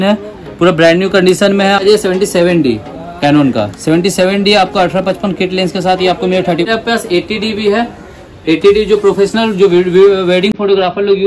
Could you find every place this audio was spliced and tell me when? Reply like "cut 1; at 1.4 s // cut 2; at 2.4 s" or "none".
cut 1; at 1.8 s // cut 2; at 6.7 s